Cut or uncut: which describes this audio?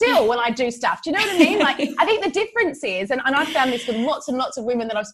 uncut